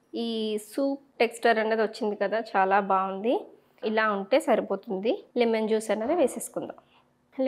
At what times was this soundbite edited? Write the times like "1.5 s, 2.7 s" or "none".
5.2 s